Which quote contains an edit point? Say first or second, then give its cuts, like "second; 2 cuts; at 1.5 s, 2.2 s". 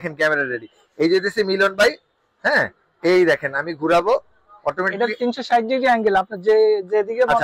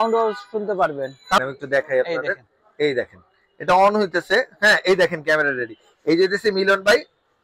second; 1 cut; at 1.4 s